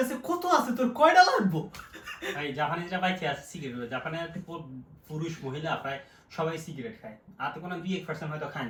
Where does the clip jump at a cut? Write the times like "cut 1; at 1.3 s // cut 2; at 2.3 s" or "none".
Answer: none